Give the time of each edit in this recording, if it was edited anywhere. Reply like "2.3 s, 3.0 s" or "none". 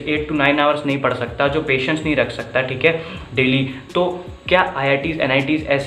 none